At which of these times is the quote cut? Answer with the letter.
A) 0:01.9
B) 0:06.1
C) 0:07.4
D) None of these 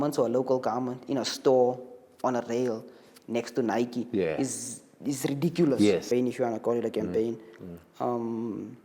B